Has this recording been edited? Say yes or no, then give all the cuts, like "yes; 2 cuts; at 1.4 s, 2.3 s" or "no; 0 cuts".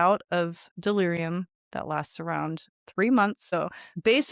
yes; 2 cuts; at 1.6 s, 3.4 s